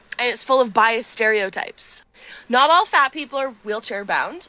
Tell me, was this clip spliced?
no; 0 cuts

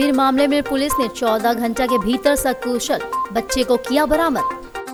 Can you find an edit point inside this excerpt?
no; 0 cuts

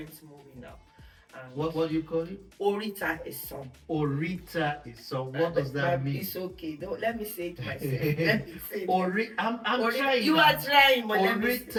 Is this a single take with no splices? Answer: yes; 0 cuts

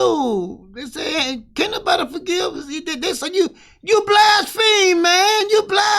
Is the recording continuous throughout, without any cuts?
yes; 0 cuts

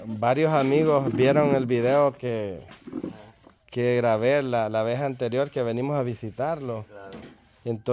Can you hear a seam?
no; 0 cuts

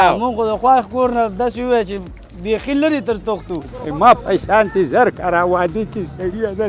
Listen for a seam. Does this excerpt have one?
yes; 1 cut; at 3.6 s

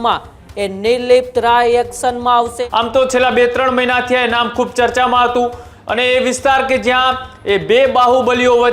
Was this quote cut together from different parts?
yes; 2 cuts; at 2.5 s, 5.7 s

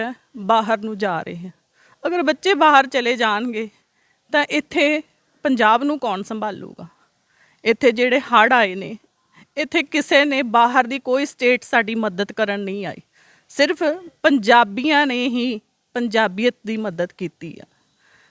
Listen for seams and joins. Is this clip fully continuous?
yes; 0 cuts

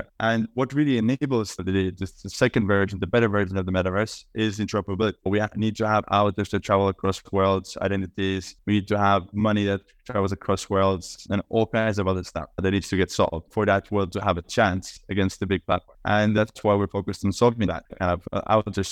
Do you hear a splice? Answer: yes; 2 cuts; at 16.4 s, 17.9 s

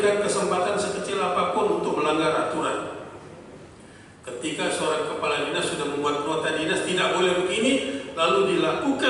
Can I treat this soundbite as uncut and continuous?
yes; 0 cuts

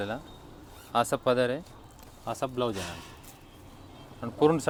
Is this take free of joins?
yes; 0 cuts

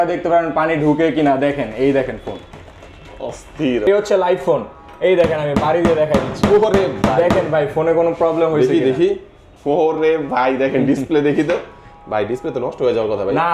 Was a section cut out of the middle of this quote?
yes; 1 cut; at 3.9 s

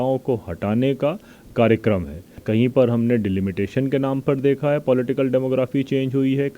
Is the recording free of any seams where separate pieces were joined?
no; 1 cut; at 2.4 s

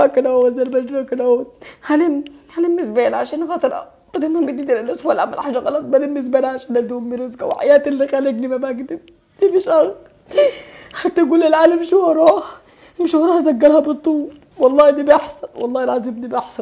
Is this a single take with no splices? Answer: yes; 0 cuts

